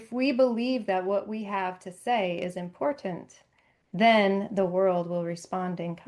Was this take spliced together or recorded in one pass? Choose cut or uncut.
uncut